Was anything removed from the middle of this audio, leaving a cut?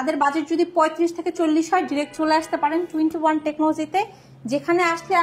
no; 0 cuts

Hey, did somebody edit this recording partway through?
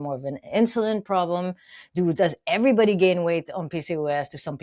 no; 0 cuts

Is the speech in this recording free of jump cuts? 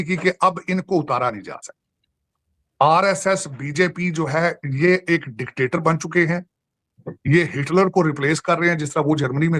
yes; 0 cuts

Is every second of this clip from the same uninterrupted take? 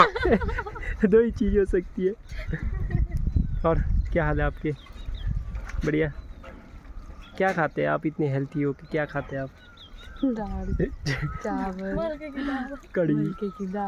yes; 0 cuts

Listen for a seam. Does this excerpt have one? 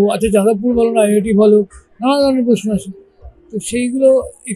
no; 0 cuts

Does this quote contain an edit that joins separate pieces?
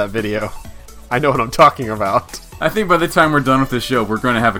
yes; 1 cut; at 2.4 s

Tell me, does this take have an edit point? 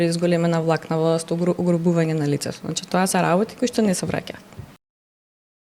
no; 0 cuts

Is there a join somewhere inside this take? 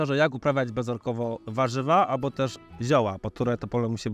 no; 0 cuts

